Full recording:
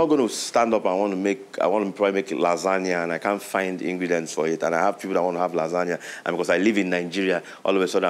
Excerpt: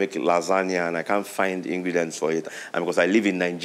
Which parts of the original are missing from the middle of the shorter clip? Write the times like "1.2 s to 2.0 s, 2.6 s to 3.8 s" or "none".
4.6 s to 6.0 s